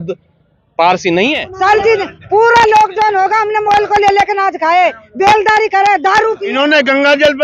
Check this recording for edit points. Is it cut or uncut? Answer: cut